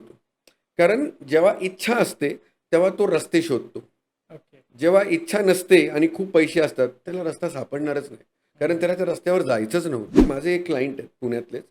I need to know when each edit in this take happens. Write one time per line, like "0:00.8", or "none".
0:10.2